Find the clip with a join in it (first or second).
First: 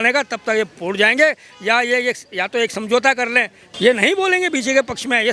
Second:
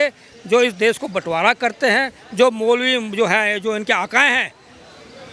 first